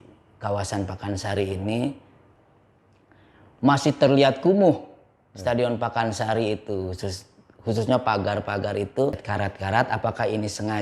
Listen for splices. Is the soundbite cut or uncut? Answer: cut